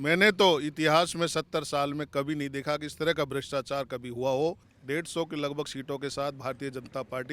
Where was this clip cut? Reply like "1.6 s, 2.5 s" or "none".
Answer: 4.7 s